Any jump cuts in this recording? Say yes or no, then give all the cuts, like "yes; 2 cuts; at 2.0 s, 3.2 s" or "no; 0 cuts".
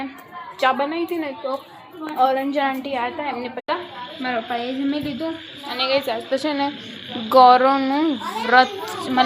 yes; 1 cut; at 3.6 s